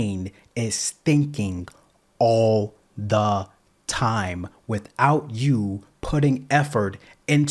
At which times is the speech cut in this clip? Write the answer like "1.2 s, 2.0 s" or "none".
none